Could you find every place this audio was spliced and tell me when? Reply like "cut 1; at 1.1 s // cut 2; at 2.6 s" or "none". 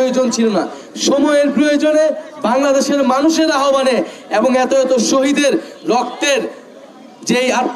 none